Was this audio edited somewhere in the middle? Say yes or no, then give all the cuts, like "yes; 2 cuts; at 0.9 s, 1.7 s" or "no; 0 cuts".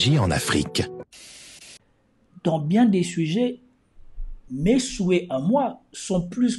yes; 1 cut; at 1.6 s